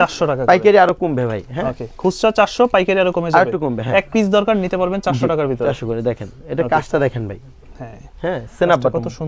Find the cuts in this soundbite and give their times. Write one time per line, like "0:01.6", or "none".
none